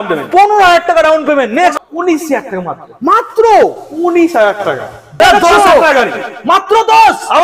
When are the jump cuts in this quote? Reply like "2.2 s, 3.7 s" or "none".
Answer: 1.7 s, 5.2 s